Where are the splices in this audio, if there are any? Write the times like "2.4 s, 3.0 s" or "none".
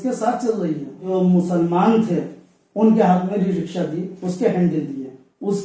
0.9 s